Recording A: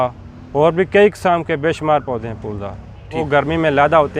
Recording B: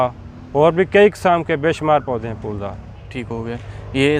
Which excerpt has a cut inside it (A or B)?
A